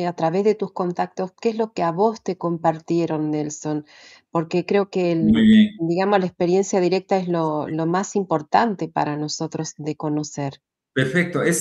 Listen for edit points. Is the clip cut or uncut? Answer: uncut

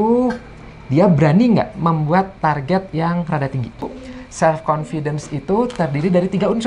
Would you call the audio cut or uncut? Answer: cut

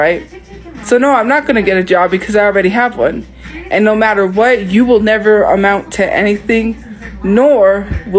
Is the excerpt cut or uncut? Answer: uncut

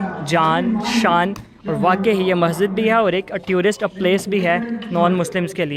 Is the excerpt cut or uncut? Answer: uncut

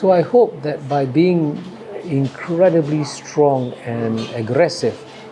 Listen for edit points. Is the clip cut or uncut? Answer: uncut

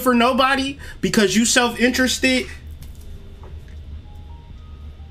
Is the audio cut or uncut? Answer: uncut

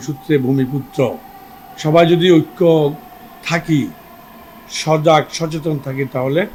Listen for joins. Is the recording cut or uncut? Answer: uncut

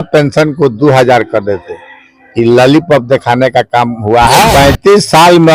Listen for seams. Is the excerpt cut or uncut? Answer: cut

